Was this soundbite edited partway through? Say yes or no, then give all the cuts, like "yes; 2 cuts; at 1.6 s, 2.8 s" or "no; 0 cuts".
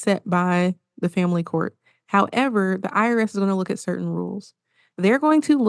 no; 0 cuts